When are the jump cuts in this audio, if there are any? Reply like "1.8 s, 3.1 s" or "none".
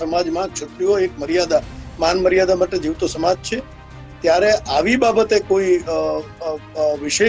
none